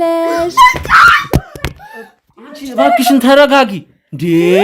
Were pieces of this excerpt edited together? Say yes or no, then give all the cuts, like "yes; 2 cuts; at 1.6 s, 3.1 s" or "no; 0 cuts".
no; 0 cuts